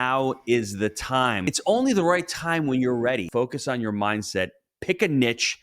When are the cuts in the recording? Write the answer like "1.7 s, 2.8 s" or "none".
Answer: 1.5 s, 3.3 s